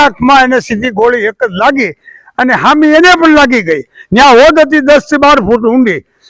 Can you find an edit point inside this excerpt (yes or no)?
no